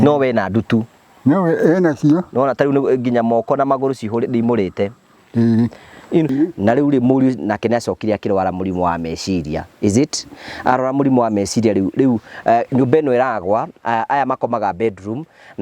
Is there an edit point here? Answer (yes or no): yes